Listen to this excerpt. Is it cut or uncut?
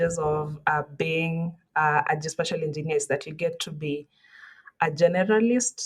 uncut